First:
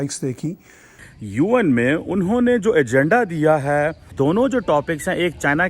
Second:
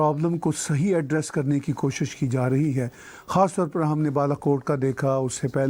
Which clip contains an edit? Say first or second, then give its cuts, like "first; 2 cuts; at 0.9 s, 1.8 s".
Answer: first; 1 cut; at 1.2 s